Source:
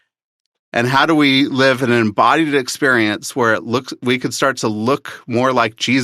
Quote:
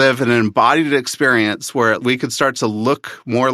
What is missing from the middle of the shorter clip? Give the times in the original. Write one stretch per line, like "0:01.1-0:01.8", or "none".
0:03.6-0:04.0

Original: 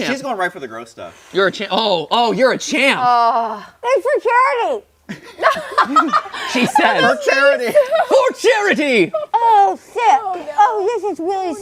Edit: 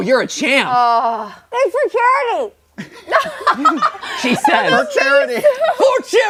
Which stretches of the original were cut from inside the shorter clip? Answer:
none

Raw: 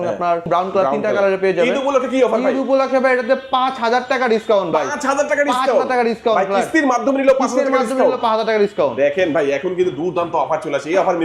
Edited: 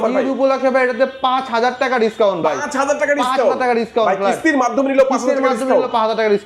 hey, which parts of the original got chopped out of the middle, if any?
none

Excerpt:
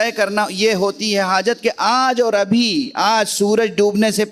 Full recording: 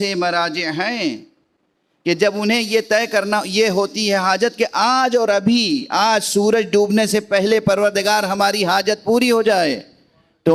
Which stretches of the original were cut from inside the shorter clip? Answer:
none

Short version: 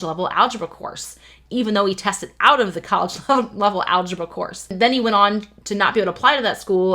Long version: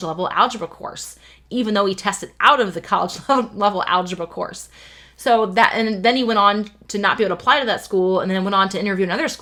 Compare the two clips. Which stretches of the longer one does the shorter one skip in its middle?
0:04.7-0:06.0

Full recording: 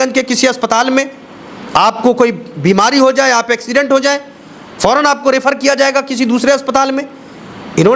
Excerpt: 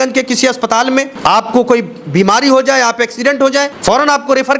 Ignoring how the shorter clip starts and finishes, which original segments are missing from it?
0:01.1-0:01.6
0:04.2-0:04.7

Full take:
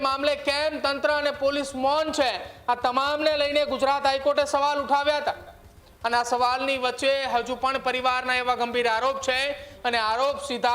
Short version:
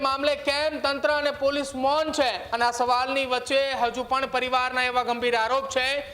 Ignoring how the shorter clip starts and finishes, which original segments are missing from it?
0:02.4-0:06.0

